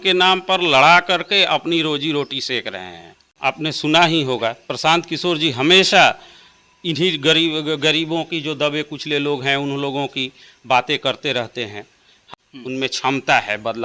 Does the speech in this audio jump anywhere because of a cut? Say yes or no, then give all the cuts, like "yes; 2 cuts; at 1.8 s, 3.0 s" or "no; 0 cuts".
yes; 2 cuts; at 3.6 s, 12.2 s